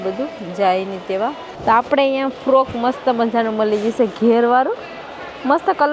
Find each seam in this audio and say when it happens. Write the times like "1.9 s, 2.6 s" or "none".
1.5 s